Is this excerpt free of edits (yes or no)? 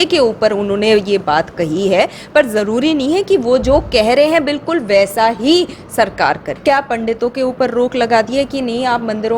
no